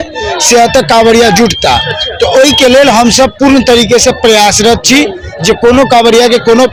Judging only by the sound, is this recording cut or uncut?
uncut